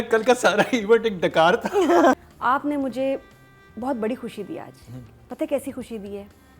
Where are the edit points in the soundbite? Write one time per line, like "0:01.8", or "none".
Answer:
0:02.2